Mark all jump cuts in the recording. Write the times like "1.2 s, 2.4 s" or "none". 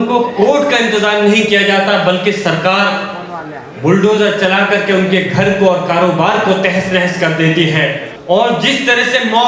8.1 s